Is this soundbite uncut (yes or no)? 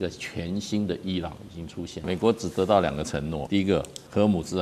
no